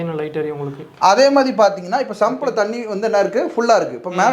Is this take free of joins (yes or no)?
yes